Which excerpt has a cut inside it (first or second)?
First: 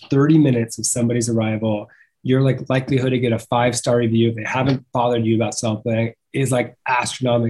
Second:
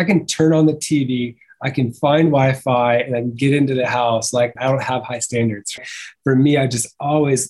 second